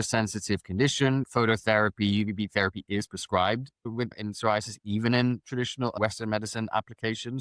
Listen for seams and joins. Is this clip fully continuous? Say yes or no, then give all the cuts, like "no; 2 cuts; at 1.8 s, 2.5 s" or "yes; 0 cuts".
no; 3 cuts; at 1.3 s, 4.2 s, 5.9 s